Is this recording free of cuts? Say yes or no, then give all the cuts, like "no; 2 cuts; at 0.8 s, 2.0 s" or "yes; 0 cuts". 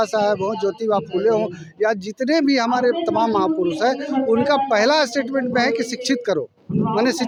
yes; 0 cuts